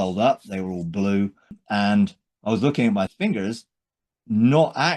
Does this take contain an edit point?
yes; 2 cuts; at 1.6 s, 3.1 s

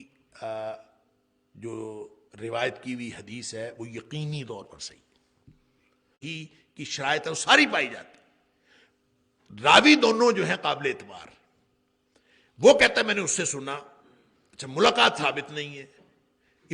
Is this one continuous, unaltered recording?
no; 1 cut; at 6.2 s

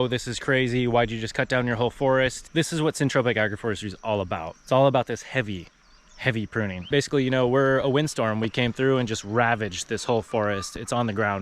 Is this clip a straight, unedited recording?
no; 3 cuts; at 2.4 s, 4.5 s, 6.9 s

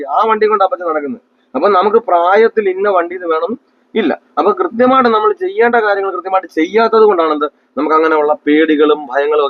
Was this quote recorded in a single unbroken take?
yes; 0 cuts

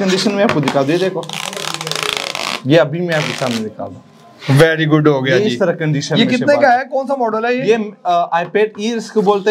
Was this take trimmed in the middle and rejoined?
no; 0 cuts

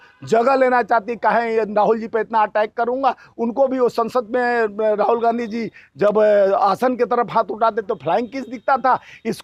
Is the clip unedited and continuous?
yes; 0 cuts

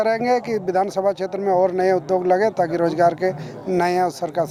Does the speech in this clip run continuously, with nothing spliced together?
yes; 0 cuts

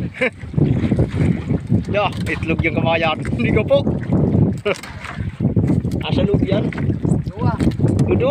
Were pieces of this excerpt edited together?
yes; 1 cut; at 5.3 s

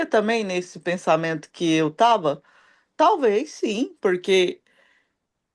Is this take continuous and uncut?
yes; 0 cuts

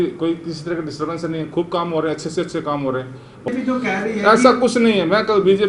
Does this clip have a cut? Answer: yes; 1 cut; at 3.5 s

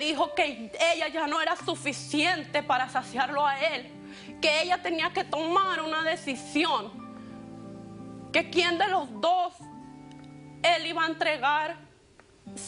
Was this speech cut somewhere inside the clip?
no; 0 cuts

